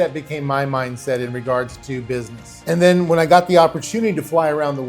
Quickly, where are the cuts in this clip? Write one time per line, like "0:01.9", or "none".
0:02.6